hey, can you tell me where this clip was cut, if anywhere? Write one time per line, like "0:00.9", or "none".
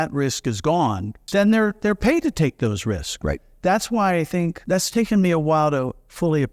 0:01.1
0:04.6